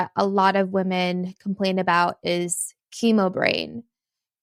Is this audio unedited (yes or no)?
yes